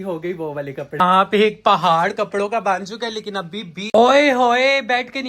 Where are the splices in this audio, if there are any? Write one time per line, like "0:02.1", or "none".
0:01.0
0:03.8